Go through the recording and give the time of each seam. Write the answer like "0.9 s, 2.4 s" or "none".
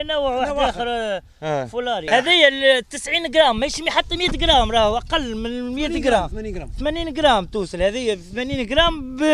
2.1 s